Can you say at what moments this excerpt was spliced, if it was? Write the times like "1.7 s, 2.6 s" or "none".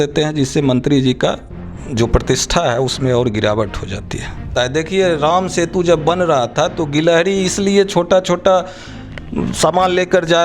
4.5 s